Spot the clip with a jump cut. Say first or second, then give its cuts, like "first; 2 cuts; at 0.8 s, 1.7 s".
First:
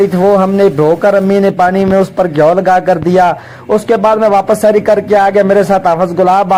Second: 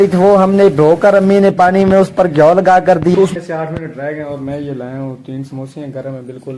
second; 1 cut; at 3.1 s